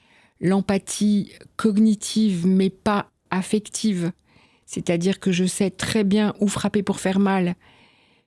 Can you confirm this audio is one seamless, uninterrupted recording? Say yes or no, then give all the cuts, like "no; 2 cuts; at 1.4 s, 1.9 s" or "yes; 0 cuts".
yes; 0 cuts